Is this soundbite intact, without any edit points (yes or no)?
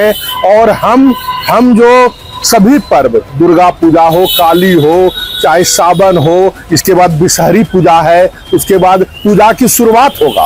yes